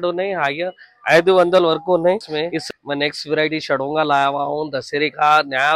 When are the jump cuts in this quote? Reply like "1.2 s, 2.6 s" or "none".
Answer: 2.6 s